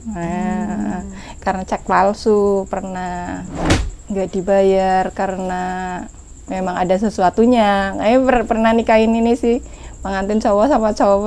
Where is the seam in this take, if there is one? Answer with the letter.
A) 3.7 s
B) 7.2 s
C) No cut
A